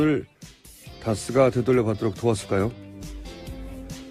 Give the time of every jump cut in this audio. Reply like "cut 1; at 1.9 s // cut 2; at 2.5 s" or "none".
cut 1; at 1.2 s

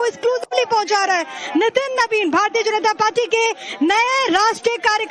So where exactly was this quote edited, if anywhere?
none

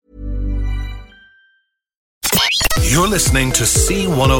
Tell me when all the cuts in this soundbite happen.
cut 1; at 2.3 s

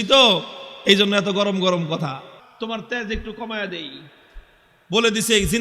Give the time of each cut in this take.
cut 1; at 2.4 s

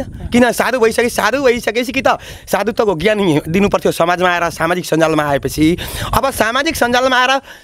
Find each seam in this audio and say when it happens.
none

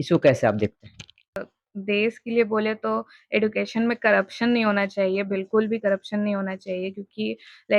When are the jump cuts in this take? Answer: cut 1; at 1.4 s

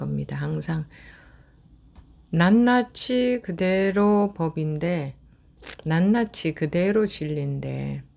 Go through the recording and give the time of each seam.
none

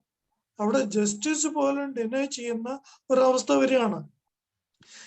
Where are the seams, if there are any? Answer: none

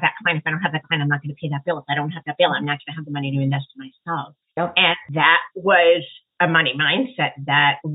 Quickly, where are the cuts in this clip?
cut 1; at 4.4 s // cut 2; at 5.4 s // cut 3; at 6.2 s

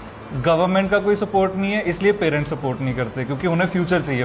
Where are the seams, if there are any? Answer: none

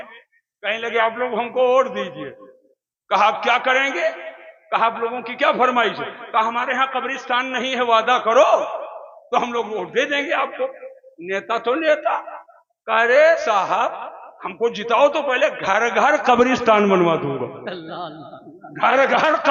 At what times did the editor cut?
none

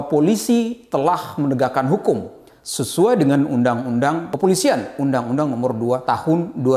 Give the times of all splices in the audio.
cut 1; at 4.3 s // cut 2; at 6.0 s

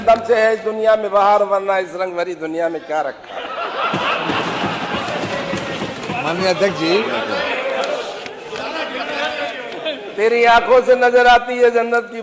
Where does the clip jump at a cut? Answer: none

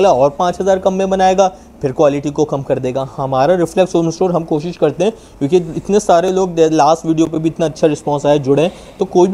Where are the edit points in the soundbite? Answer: none

